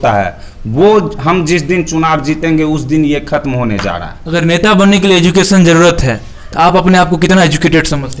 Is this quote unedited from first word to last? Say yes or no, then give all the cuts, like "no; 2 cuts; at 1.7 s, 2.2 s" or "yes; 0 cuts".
no; 1 cut; at 4.1 s